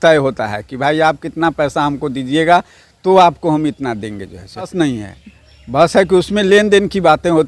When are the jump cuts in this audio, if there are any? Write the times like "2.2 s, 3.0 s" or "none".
4.7 s

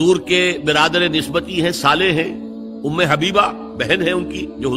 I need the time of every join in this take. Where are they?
none

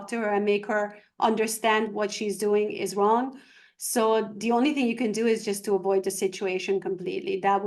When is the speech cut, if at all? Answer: none

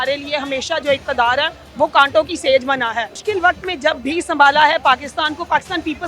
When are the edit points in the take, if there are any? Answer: 1.6 s, 3.2 s

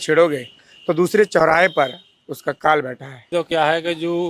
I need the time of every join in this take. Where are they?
3.3 s

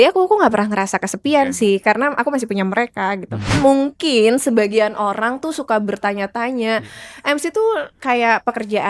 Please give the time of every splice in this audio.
3.6 s

